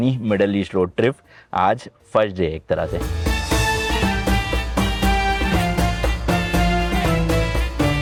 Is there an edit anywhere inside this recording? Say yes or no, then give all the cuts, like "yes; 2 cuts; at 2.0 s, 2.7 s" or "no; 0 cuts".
no; 0 cuts